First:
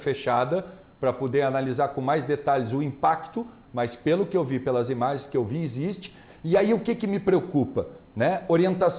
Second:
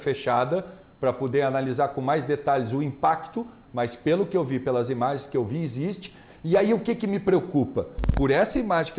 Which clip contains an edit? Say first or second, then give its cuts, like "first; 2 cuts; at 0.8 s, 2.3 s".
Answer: second; 1 cut; at 8.0 s